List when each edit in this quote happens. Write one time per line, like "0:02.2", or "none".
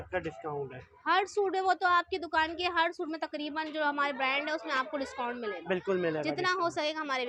none